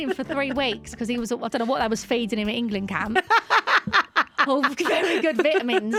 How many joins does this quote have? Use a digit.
0